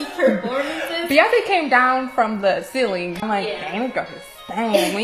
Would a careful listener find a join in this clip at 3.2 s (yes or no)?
yes